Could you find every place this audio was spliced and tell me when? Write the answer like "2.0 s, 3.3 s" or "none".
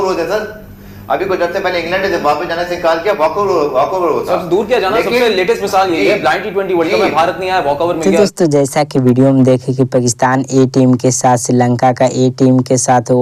none

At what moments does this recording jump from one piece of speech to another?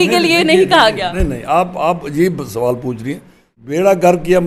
3.5 s

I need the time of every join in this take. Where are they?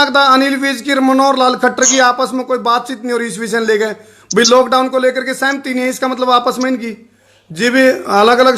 none

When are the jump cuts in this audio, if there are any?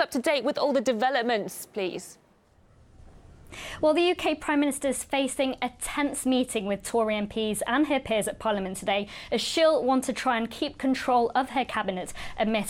6.5 s

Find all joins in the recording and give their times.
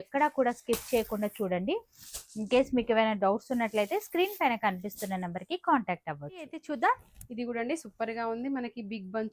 none

